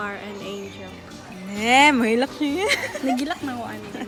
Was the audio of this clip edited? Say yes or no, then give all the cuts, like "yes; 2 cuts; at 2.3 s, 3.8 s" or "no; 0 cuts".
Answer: no; 0 cuts